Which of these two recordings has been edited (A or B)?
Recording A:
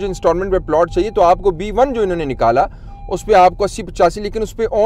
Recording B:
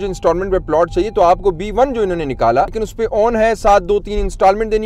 B